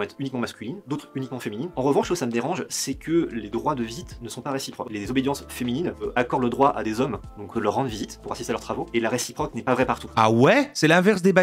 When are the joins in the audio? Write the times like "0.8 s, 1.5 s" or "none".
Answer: 1.7 s, 4.9 s, 6.0 s, 7.5 s, 10.1 s